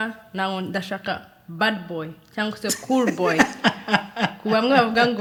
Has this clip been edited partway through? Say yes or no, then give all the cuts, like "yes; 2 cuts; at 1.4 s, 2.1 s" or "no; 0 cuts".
no; 0 cuts